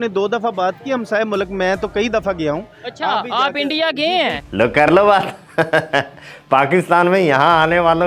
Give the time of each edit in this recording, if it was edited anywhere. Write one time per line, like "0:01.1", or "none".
none